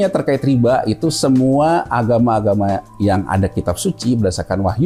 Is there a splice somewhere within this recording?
no; 0 cuts

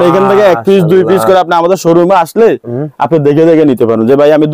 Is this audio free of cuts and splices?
yes; 0 cuts

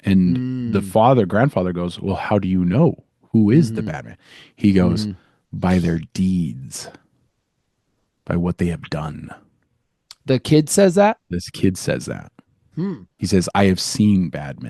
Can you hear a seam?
no; 0 cuts

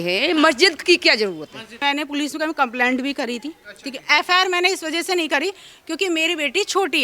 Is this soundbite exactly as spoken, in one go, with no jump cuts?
no; 1 cut; at 1.8 s

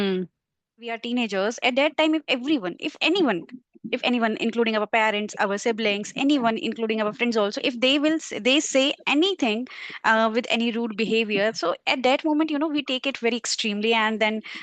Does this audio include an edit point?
yes; 1 cut; at 1.0 s

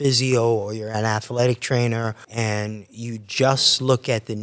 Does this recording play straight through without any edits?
no; 1 cut; at 2.2 s

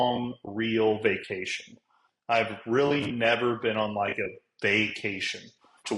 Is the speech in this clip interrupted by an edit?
no; 0 cuts

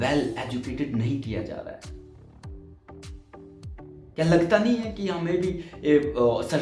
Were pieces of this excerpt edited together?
no; 0 cuts

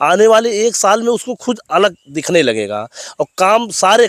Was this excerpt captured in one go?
yes; 0 cuts

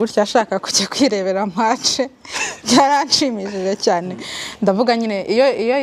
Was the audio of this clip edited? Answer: no; 0 cuts

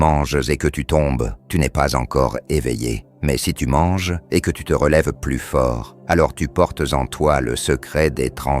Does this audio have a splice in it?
yes; 4 cuts; at 1.4 s, 3.1 s, 4.2 s, 5.9 s

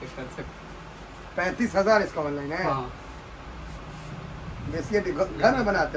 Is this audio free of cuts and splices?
yes; 0 cuts

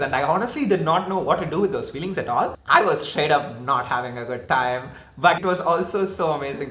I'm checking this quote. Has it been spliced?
yes; 2 cuts; at 2.6 s, 5.4 s

